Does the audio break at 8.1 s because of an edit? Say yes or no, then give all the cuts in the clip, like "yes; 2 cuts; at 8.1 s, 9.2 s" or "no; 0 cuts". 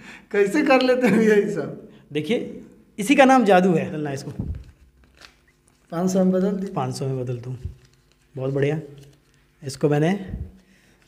no; 1 cut; at 4.0 s